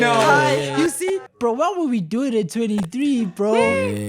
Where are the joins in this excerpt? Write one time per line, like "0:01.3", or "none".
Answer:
0:01.0